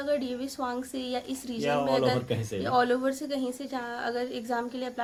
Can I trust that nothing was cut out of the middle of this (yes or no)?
yes